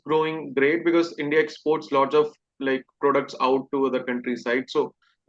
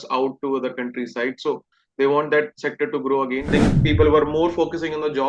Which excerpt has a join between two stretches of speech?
second; 1 cut; at 3.5 s

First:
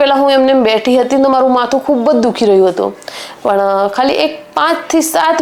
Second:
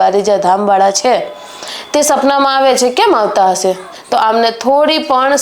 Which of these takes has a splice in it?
second; 1 cut; at 3.9 s

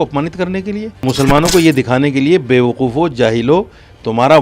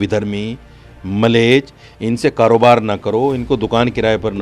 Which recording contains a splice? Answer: first; 1 cut; at 1.0 s

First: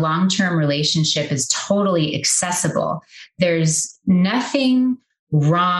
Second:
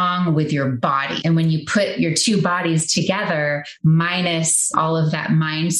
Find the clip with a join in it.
second; 2 cuts; at 1.1 s, 4.7 s

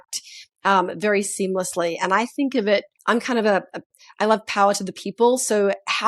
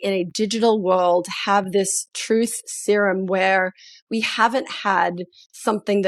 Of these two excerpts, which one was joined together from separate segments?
first; 1 cut; at 2.9 s

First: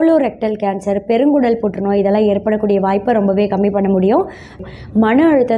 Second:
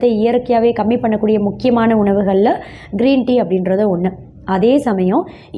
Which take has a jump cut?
first; 1 cut; at 4.6 s

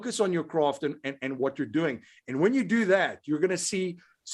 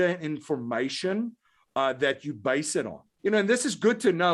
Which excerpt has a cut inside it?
second; 1 cut; at 3.0 s

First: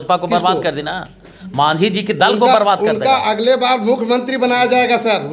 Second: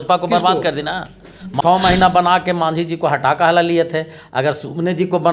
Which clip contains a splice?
second; 1 cut; at 1.6 s

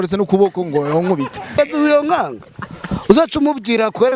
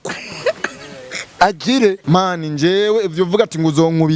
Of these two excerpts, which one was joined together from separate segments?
second; 1 cut; at 2.0 s

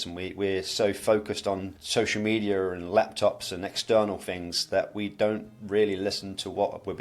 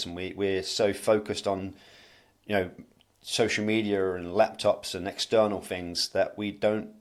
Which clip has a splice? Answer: first; 1 cut; at 1.8 s

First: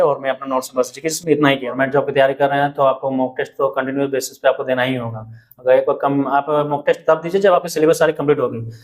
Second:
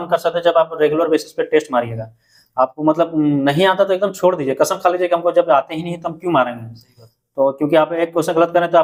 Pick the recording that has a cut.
first; 1 cut; at 1.7 s

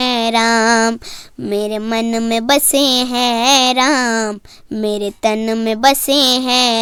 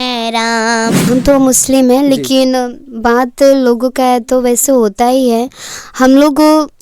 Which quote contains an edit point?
second; 1 cut; at 1.0 s

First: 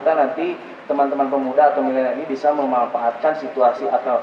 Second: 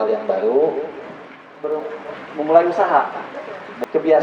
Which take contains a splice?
second; 1 cut; at 1.8 s

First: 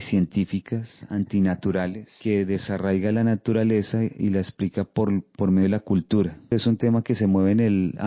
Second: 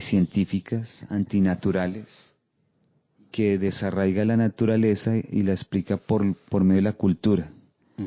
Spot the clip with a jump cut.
first; 2 cuts; at 2.1 s, 6.5 s

